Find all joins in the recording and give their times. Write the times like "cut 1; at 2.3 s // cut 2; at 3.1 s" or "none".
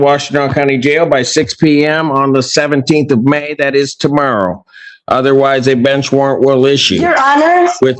none